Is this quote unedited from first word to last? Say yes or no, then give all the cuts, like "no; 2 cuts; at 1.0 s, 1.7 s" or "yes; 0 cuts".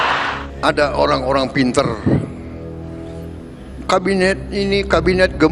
no; 2 cuts; at 2.4 s, 3.7 s